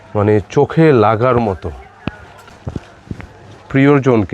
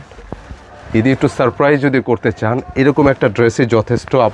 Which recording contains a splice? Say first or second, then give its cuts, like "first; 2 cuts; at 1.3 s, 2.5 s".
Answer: first; 1 cut; at 2.6 s